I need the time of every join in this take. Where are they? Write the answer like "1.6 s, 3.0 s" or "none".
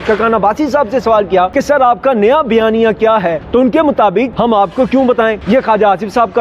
1.5 s, 3.4 s, 4.3 s, 5.4 s